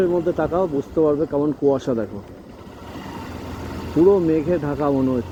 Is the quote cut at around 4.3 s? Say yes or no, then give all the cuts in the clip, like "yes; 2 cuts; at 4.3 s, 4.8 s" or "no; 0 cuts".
no; 0 cuts